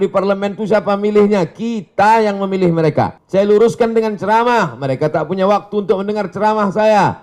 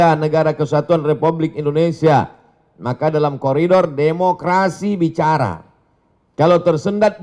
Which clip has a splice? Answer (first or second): first